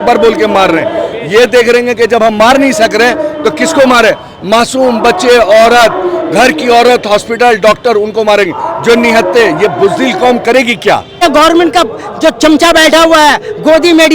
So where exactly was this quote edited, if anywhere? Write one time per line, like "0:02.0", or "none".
0:11.2